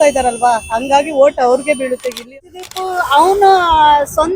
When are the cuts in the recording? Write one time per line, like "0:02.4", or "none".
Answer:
0:02.3